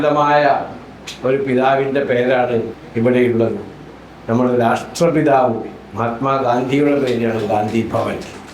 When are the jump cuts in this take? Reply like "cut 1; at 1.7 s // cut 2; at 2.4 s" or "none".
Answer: cut 1; at 2.8 s